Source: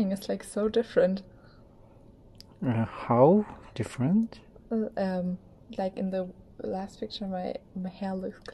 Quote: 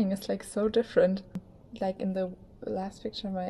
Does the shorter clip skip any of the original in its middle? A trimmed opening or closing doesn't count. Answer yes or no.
yes